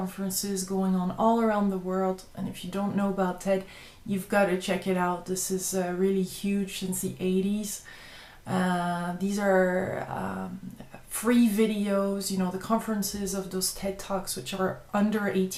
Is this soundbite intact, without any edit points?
yes; 0 cuts

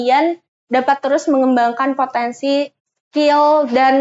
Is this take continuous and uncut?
yes; 0 cuts

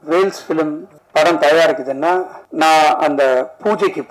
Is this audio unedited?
no; 2 cuts; at 0.9 s, 2.4 s

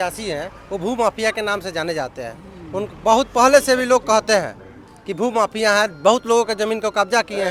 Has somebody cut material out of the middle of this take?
no; 0 cuts

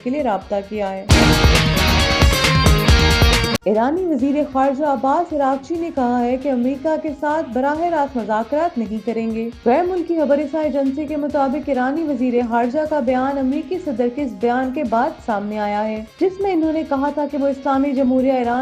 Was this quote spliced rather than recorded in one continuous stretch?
yes; 2 cuts; at 1.0 s, 3.6 s

